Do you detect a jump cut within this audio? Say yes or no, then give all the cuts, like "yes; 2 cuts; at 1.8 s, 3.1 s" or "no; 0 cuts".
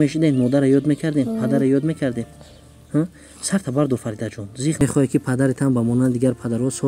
yes; 1 cut; at 4.8 s